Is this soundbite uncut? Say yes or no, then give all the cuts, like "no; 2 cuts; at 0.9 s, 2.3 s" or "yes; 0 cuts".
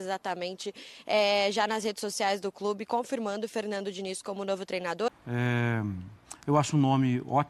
no; 1 cut; at 5.1 s